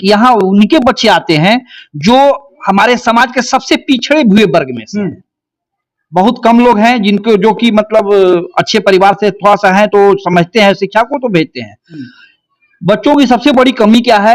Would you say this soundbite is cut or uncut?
uncut